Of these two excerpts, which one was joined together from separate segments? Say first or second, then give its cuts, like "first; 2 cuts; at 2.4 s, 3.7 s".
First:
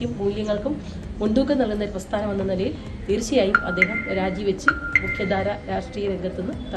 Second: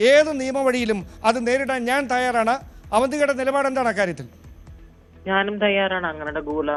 first; 1 cut; at 2.3 s